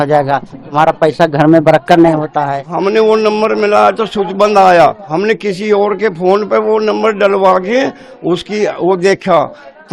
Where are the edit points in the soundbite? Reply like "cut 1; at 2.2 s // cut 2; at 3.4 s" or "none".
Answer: cut 1; at 2.7 s // cut 2; at 5.0 s